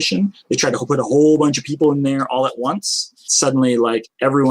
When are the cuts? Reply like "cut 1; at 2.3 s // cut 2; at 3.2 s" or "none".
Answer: cut 1; at 3.2 s